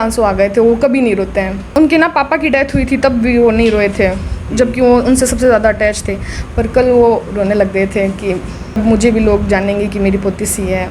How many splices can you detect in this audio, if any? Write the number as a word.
two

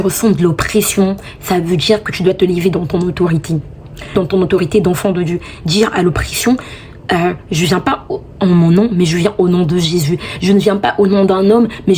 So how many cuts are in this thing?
one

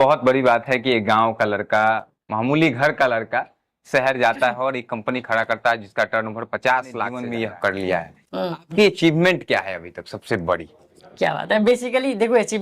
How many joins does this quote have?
one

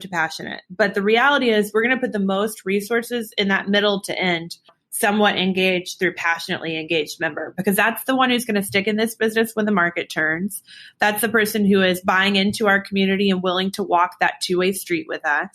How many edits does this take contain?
one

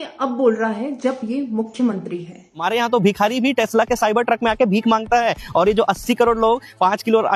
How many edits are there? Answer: one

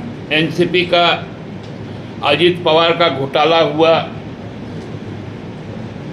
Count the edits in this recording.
zero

